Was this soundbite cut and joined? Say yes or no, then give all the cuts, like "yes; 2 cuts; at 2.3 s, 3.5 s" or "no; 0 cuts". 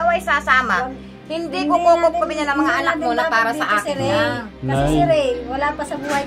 no; 0 cuts